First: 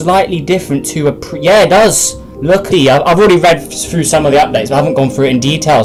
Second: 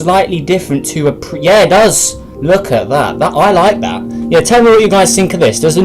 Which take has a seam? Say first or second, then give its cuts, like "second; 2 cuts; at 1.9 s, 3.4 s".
second; 1 cut; at 2.7 s